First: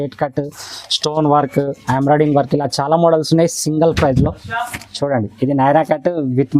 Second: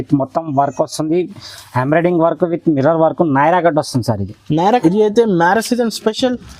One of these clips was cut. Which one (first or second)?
second